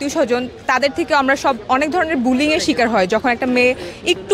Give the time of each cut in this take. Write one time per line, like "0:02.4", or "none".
none